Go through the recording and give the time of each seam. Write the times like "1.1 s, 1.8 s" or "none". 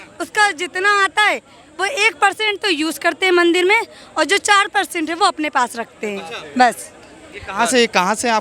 none